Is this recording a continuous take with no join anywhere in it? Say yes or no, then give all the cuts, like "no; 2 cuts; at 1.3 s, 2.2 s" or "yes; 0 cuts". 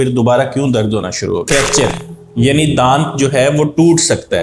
no; 1 cut; at 1.4 s